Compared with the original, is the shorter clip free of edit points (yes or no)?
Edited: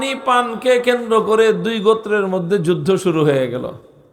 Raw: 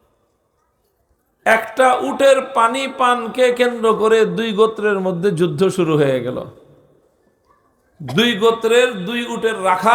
yes